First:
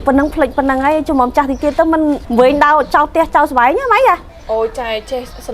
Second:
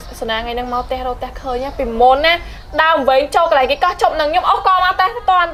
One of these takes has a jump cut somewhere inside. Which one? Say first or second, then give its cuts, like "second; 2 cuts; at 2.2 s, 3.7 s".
first; 2 cuts; at 2.2 s, 4.3 s